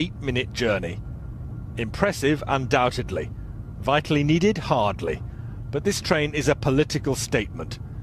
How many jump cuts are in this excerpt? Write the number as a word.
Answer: one